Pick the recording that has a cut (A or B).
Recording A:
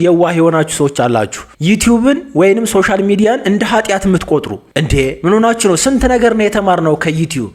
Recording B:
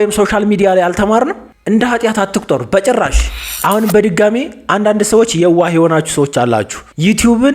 B